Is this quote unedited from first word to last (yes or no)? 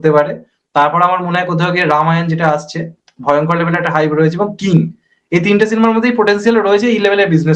yes